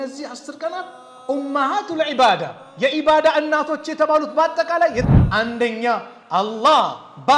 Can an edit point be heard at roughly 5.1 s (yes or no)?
yes